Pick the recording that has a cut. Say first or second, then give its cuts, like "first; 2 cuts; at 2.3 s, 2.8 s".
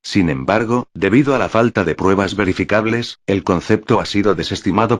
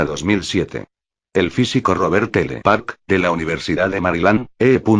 first; 1 cut; at 0.9 s